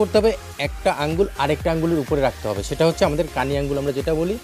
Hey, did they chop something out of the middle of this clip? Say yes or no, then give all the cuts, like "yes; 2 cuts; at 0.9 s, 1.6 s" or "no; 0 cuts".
no; 0 cuts